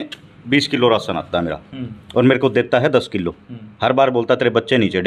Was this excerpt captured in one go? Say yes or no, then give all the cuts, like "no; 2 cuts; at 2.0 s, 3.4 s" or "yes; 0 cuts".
yes; 0 cuts